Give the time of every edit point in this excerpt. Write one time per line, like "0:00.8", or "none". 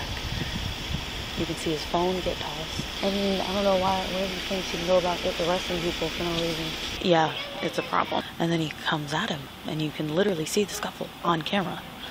0:02.9
0:06.9
0:08.3